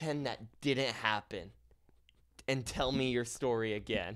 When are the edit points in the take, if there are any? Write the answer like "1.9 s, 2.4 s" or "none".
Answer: none